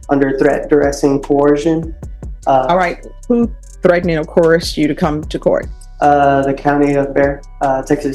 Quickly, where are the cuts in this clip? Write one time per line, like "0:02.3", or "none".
none